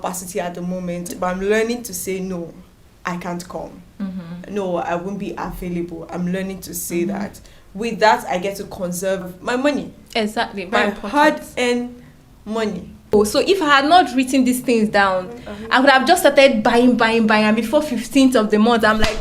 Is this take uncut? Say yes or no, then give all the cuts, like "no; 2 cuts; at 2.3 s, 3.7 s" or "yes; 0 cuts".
no; 4 cuts; at 1.1 s, 7.5 s, 9.3 s, 13.1 s